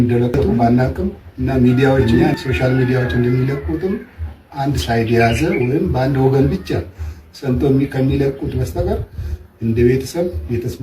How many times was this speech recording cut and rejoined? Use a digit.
1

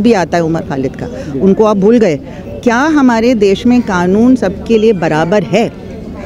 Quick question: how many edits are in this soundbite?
1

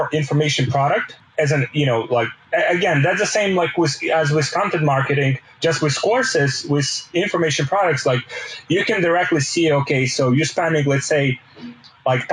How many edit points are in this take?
2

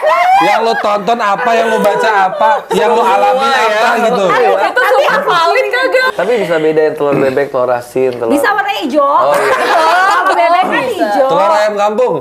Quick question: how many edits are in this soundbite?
1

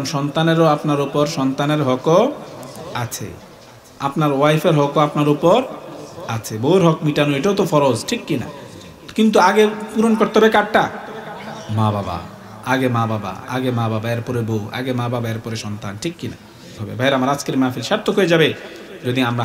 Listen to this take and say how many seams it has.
1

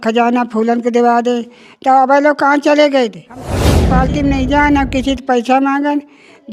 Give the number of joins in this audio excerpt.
1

